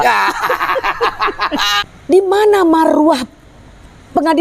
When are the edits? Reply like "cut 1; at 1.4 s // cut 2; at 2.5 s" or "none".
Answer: cut 1; at 1.7 s